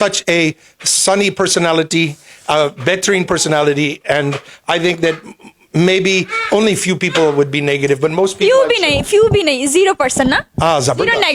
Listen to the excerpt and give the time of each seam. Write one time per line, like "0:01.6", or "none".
none